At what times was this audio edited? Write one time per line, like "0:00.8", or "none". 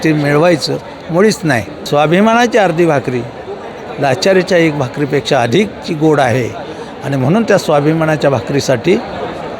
0:01.7

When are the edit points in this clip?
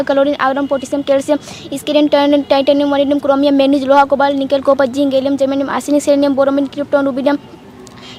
none

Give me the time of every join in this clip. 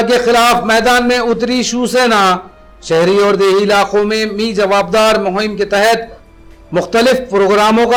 none

